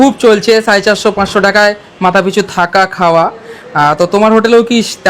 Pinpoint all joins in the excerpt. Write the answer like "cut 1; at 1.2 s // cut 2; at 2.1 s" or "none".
none